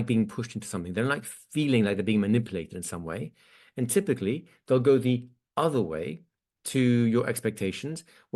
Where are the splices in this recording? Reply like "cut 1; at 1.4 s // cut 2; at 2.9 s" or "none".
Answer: none